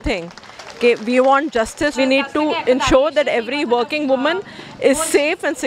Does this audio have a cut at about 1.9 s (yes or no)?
yes